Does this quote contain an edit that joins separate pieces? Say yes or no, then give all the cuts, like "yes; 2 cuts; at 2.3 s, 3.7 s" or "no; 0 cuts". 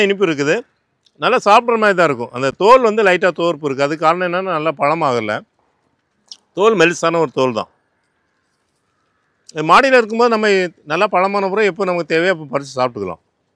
no; 0 cuts